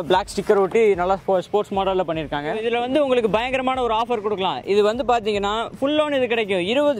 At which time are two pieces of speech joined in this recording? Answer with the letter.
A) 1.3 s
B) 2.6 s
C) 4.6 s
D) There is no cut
B